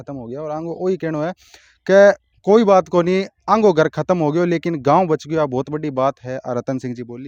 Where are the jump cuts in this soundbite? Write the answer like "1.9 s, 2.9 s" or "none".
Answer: none